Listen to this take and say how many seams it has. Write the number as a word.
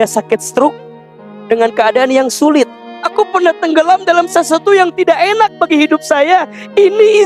one